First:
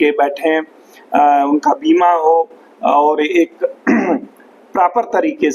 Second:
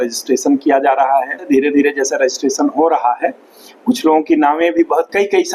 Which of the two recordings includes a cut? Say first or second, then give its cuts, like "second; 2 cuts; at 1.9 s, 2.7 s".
second; 1 cut; at 1.5 s